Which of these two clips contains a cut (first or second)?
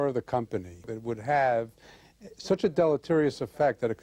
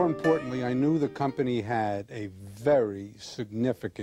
first